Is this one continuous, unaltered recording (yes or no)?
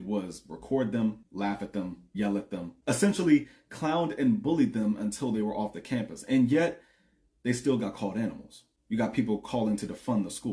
yes